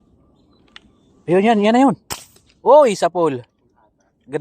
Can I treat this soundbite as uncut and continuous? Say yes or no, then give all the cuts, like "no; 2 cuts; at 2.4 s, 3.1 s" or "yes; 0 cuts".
no; 2 cuts; at 1.7 s, 3.0 s